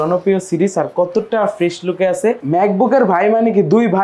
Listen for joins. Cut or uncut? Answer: cut